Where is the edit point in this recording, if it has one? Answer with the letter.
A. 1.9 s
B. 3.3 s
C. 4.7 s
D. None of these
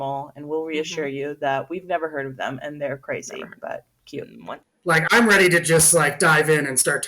C